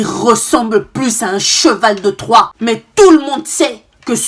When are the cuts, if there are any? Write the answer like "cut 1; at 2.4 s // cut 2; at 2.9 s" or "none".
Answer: cut 1; at 2.6 s